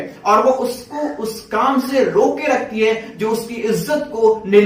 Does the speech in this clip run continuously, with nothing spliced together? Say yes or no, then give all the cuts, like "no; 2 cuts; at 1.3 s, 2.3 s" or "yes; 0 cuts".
yes; 0 cuts